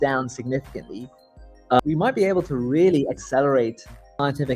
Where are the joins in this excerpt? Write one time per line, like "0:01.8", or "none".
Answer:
none